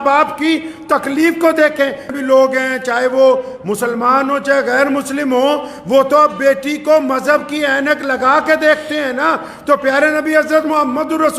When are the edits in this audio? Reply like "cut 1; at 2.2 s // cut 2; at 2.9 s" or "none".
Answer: cut 1; at 2.0 s